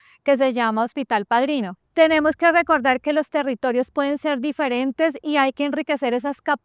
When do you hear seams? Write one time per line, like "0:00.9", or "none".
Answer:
0:01.8